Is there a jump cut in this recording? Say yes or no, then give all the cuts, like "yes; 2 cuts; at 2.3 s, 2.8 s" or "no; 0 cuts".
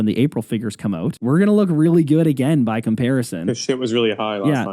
yes; 1 cut; at 1.2 s